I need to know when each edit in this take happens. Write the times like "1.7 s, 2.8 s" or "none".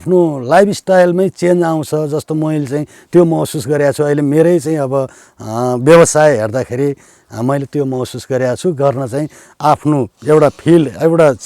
none

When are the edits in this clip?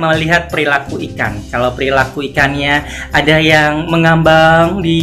none

